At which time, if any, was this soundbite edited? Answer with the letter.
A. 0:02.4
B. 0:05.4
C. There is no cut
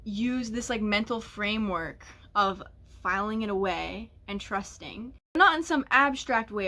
B